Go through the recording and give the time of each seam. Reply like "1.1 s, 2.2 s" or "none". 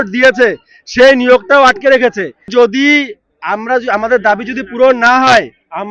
2.5 s